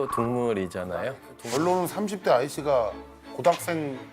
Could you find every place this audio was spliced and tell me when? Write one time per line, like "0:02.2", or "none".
0:01.3